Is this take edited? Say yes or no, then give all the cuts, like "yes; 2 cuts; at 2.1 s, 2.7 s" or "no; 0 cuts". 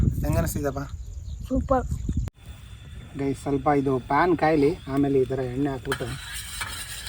yes; 1 cut; at 2.3 s